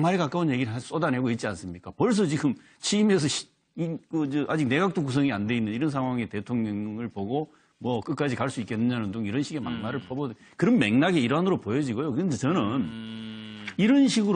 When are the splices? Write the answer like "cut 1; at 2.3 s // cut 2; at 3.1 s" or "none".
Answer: none